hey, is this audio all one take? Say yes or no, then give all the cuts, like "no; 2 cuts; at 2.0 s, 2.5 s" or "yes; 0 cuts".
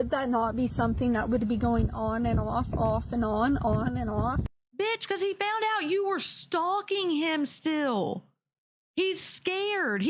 yes; 0 cuts